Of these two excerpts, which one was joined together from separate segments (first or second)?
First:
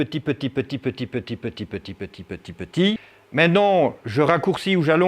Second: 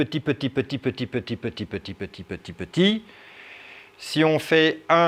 first